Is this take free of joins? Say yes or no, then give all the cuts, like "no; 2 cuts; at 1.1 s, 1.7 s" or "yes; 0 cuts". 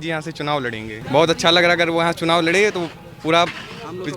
no; 1 cut; at 1.0 s